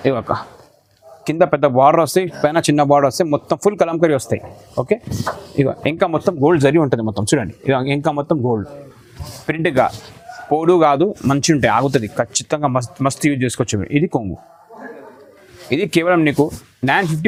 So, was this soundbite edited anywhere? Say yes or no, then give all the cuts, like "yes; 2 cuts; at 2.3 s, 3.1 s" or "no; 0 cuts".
no; 0 cuts